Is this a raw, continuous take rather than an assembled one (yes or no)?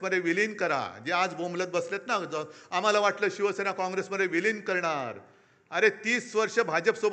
yes